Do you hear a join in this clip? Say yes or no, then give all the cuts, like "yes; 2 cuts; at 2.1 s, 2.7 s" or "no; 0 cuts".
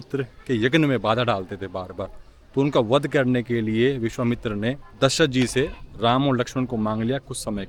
no; 0 cuts